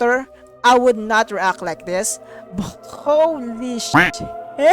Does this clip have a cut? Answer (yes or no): no